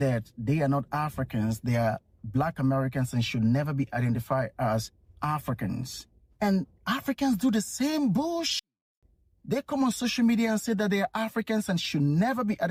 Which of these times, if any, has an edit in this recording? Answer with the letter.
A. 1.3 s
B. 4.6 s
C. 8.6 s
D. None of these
D